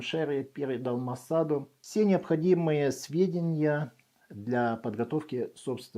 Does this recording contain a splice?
yes; 1 cut; at 1.8 s

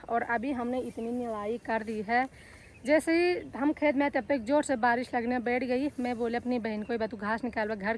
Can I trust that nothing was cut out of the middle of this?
yes; 0 cuts

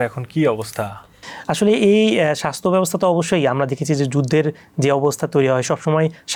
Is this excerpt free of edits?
yes; 0 cuts

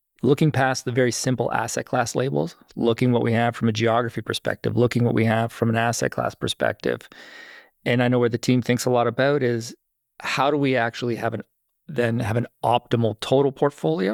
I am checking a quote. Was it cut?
no; 0 cuts

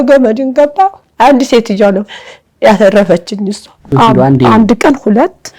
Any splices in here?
yes; 1 cut; at 3.9 s

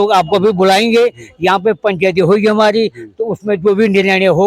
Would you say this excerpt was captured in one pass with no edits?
yes; 0 cuts

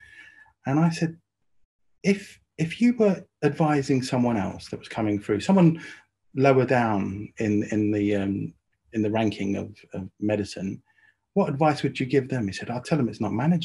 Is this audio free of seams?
yes; 0 cuts

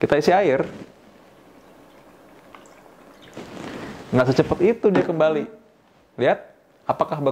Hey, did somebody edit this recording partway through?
no; 0 cuts

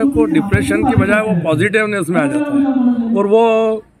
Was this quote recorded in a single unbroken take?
yes; 0 cuts

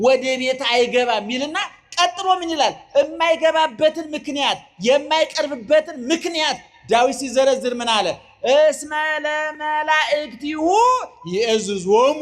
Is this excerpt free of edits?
yes; 0 cuts

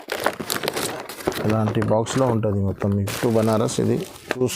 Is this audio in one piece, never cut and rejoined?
no; 1 cut; at 3.1 s

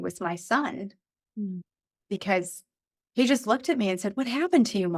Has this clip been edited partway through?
yes; 1 cut; at 3.0 s

